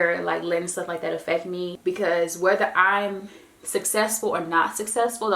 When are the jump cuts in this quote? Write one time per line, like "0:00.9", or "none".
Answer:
0:01.7